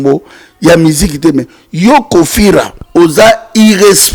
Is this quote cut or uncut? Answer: cut